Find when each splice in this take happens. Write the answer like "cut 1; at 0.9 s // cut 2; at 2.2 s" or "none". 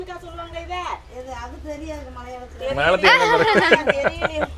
none